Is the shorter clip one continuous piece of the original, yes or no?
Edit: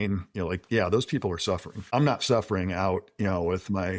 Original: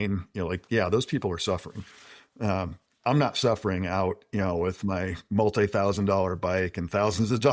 no